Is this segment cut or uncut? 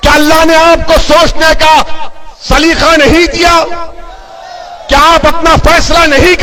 uncut